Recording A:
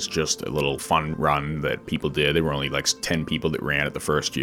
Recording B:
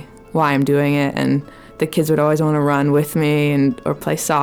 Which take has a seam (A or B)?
A